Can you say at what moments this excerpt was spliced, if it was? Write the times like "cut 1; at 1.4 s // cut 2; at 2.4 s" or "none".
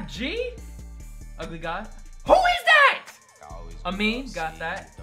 cut 1; at 1.1 s